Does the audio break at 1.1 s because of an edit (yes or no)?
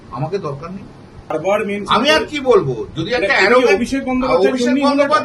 yes